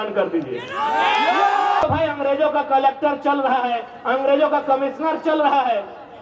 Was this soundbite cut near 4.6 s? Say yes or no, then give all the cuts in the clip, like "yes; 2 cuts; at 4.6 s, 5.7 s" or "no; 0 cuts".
no; 1 cut; at 1.8 s